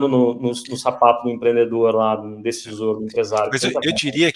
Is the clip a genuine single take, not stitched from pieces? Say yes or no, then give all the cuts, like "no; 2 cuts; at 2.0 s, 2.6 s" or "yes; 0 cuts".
yes; 0 cuts